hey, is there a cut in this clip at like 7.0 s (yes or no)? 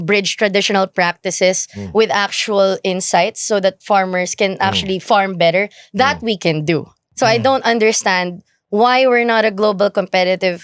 yes